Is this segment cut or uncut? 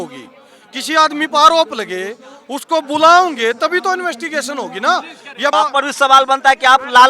cut